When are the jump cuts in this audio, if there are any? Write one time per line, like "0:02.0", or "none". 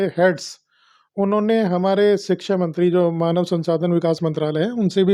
none